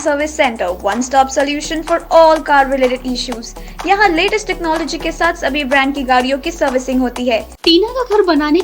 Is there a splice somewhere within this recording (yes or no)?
yes